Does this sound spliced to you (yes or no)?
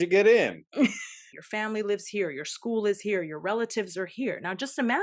yes